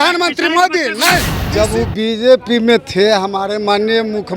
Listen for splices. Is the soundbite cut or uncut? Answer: cut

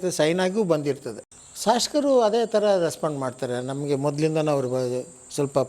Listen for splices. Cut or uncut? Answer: uncut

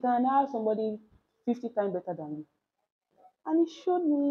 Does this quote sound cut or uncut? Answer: cut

